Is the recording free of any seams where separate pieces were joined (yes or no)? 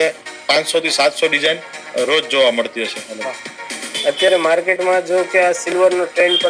no